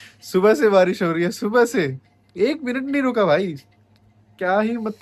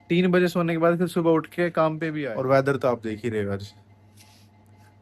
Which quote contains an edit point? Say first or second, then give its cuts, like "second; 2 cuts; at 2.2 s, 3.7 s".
second; 1 cut; at 2.1 s